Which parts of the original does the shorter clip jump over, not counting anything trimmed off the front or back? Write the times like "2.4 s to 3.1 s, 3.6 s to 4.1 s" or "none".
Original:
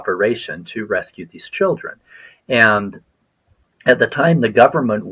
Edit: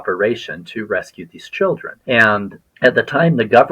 1.9 s to 2.3 s, 3.0 s to 3.6 s